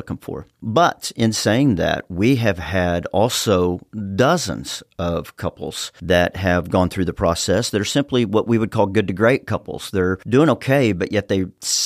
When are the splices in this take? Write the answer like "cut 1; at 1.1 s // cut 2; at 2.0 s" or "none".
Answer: none